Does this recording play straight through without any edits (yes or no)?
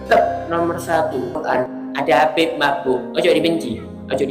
yes